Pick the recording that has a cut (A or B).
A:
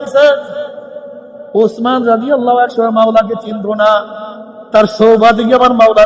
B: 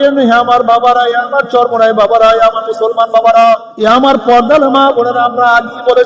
B